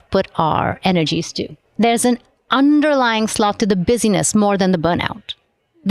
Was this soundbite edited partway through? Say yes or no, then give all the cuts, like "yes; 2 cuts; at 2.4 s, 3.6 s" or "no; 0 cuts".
yes; 1 cut; at 1.7 s